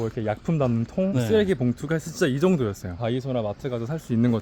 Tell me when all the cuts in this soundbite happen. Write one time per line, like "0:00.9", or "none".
0:02.8